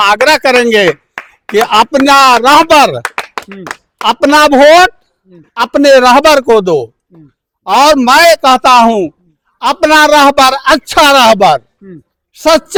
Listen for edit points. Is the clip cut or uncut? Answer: uncut